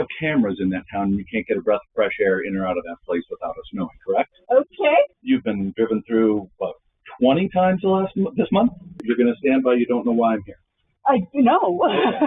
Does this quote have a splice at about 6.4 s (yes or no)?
no